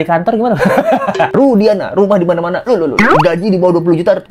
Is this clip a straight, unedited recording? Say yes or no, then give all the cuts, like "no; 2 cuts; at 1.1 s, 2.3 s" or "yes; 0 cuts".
no; 1 cut; at 1.3 s